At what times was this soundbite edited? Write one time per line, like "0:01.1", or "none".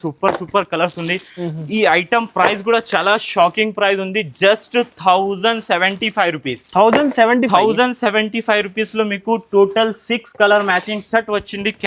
none

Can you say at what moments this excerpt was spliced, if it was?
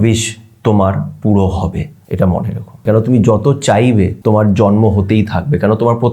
0:02.0
0:02.8
0:04.1

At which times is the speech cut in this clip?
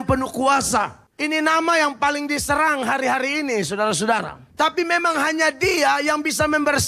0:01.0
0:04.4

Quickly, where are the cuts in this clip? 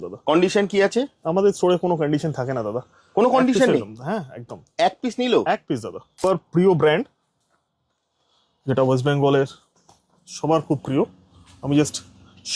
0:06.2

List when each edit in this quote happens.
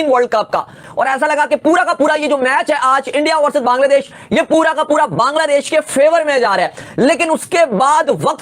none

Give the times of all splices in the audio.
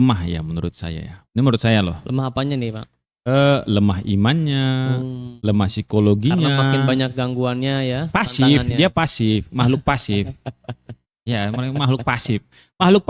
none

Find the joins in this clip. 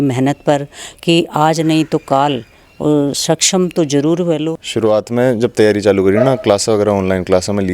0:04.6

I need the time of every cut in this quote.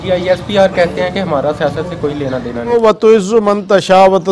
0:02.8

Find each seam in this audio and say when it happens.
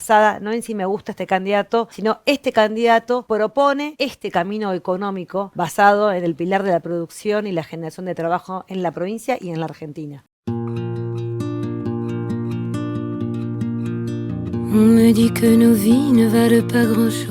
0:01.9
0:03.2
0:03.9
0:05.5
0:10.2

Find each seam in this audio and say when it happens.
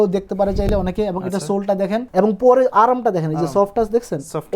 0:02.0

